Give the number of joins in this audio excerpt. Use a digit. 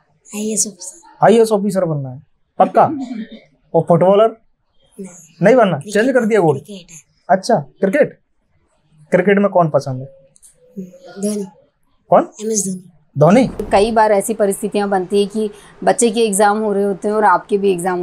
1